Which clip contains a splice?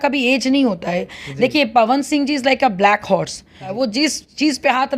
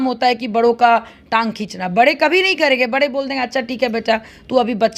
first; 1 cut; at 3.7 s

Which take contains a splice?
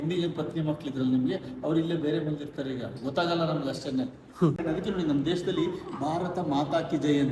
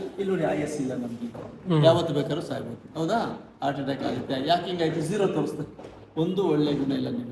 first; 1 cut; at 4.6 s

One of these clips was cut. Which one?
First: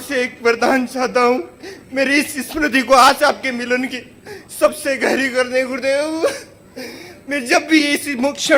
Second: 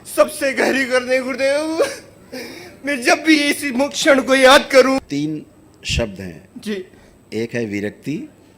second; 1 cut; at 5.0 s

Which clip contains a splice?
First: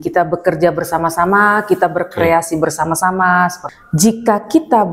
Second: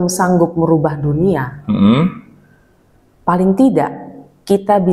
first; 1 cut; at 3.7 s

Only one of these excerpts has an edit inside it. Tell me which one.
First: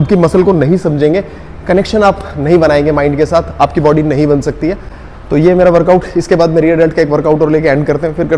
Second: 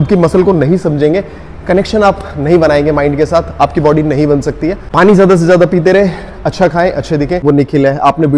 second; 2 cuts; at 4.8 s, 7.4 s

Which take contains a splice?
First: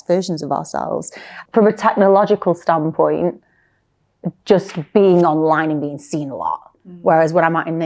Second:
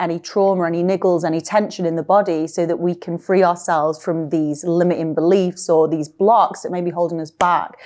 first; 1 cut; at 1.3 s

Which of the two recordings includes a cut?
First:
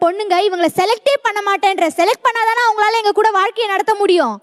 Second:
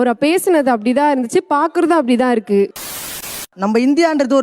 second; 1 cut; at 3.2 s

